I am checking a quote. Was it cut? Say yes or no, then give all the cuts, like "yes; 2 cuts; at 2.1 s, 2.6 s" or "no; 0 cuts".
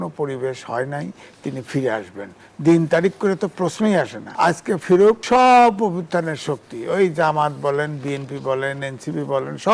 yes; 2 cuts; at 4.2 s, 5.2 s